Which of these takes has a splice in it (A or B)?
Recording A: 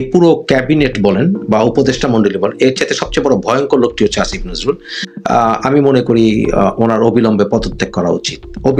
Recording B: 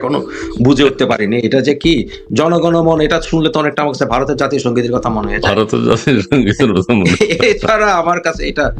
A